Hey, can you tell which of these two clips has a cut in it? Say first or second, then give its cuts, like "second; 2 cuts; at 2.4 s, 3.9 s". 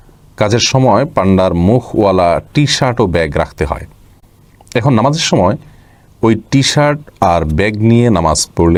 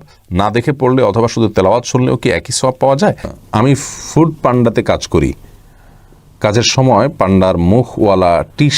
second; 1 cut; at 3.3 s